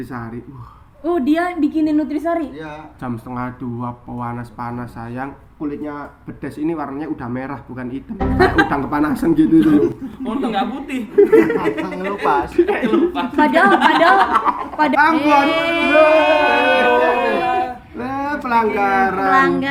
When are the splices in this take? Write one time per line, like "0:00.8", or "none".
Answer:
0:14.9